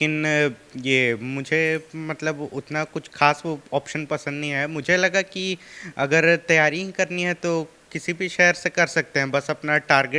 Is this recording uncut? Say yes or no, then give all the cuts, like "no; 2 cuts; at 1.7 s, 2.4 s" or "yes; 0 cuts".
yes; 0 cuts